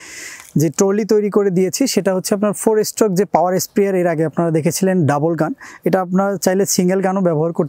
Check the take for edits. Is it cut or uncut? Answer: uncut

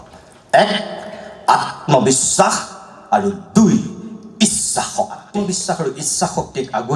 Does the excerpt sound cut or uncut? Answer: cut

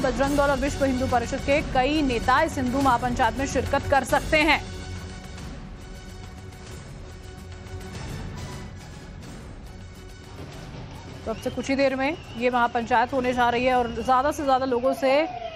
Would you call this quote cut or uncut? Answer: uncut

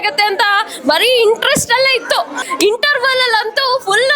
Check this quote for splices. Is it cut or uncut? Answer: cut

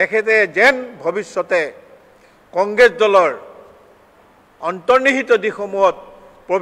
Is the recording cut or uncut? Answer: uncut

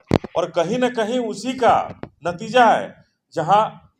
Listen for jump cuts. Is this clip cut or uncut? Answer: uncut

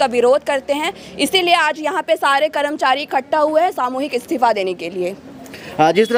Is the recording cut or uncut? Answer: uncut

